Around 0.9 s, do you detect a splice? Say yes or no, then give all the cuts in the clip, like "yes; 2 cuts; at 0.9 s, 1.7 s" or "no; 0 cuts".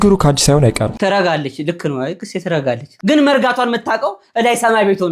yes; 1 cut; at 0.9 s